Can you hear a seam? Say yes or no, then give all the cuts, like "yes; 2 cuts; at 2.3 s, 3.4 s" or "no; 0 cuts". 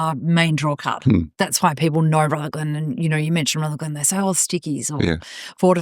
no; 0 cuts